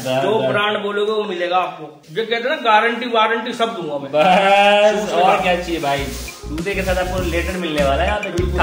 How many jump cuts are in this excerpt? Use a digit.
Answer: 1